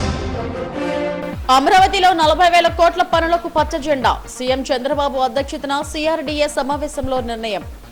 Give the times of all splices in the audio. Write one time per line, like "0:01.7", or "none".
0:01.0

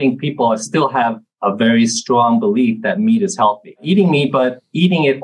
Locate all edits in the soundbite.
0:01.3
0:03.8

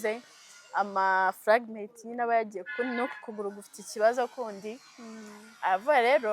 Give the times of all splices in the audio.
none

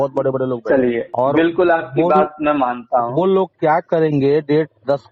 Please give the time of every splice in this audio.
0:01.1

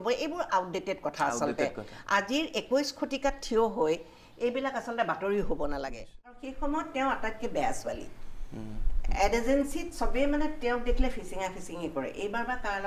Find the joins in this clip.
0:06.5

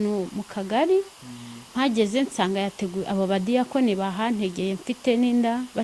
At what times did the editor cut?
none

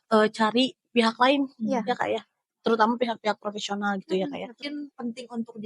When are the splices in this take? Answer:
0:04.6

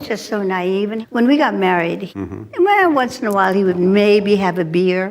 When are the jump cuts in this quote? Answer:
0:02.0

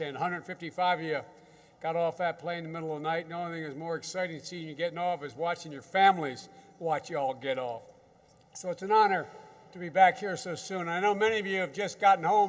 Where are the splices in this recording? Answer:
0:07.6

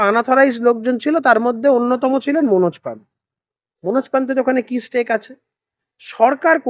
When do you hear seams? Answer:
none

